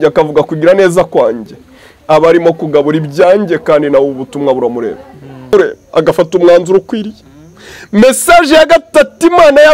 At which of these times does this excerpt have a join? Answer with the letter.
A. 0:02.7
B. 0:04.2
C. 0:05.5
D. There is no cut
C